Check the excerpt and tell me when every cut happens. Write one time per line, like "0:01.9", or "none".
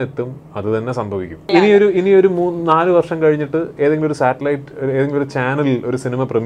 0:01.5